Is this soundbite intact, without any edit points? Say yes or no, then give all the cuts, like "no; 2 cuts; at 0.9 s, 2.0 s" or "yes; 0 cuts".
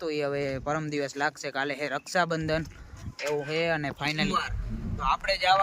no; 1 cut; at 4.2 s